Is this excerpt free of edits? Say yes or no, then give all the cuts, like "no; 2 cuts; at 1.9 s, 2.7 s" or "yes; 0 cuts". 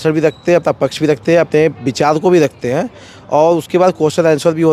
yes; 0 cuts